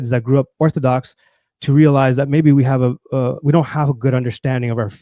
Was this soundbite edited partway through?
no; 0 cuts

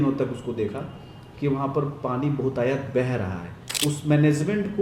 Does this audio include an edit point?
yes; 1 cut; at 3.6 s

